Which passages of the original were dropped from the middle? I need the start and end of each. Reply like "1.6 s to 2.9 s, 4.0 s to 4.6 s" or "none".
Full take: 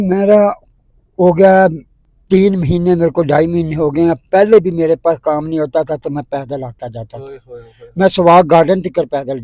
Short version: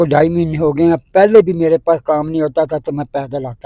none